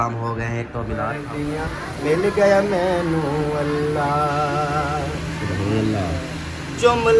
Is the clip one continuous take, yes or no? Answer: no